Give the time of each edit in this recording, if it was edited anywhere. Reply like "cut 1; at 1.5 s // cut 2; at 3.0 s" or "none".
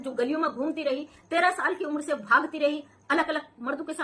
none